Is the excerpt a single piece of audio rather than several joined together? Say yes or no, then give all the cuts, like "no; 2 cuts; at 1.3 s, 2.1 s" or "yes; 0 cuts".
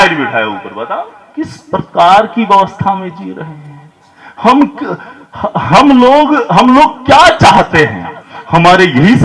no; 1 cut; at 1.6 s